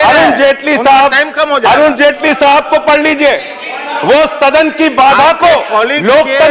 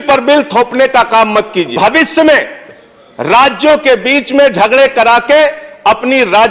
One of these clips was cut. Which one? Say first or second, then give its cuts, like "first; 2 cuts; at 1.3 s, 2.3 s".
second; 1 cut; at 1.7 s